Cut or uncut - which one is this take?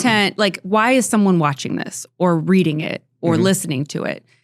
uncut